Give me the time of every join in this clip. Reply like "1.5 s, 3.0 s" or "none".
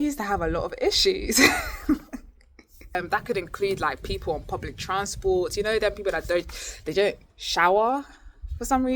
3.0 s